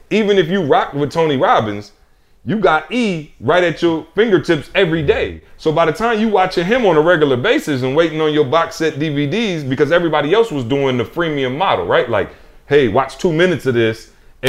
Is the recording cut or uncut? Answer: uncut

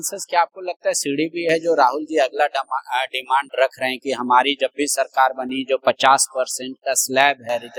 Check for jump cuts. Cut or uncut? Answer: uncut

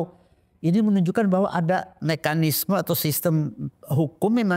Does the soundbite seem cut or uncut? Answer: cut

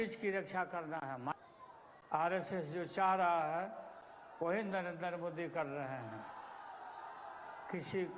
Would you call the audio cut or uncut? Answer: cut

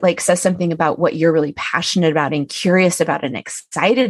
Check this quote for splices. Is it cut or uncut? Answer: uncut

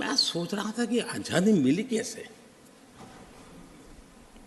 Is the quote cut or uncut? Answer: uncut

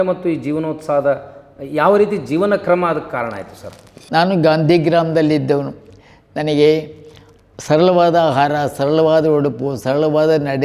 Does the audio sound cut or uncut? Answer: cut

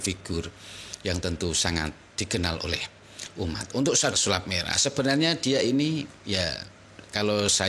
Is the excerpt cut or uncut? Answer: cut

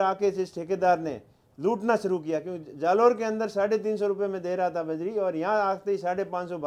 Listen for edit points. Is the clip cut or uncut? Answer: uncut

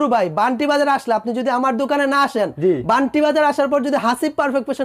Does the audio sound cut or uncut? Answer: uncut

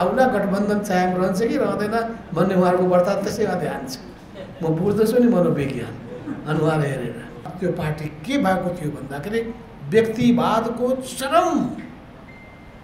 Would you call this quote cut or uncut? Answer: cut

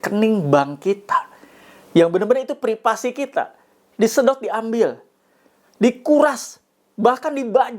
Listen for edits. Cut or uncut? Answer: uncut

